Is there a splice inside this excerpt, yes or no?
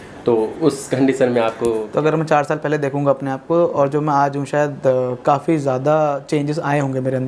yes